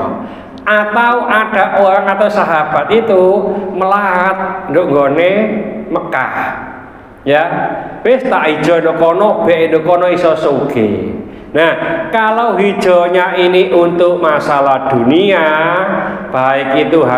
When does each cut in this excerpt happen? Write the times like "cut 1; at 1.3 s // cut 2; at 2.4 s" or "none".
none